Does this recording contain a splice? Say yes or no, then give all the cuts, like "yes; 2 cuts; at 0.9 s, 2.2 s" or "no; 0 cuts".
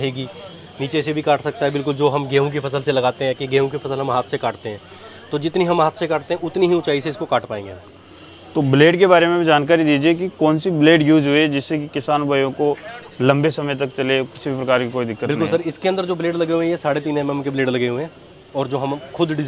no; 0 cuts